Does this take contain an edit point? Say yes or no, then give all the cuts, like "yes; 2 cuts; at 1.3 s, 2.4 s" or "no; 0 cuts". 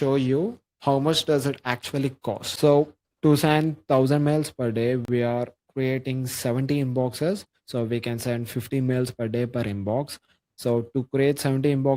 yes; 1 cut; at 2.5 s